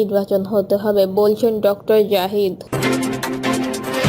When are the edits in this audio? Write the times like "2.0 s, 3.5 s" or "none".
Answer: 2.6 s